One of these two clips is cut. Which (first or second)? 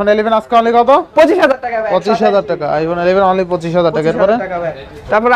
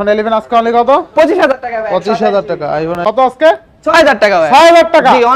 second